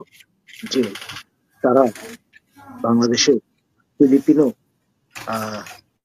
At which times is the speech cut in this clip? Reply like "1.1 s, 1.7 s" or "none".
none